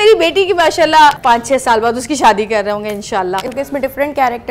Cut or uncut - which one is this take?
cut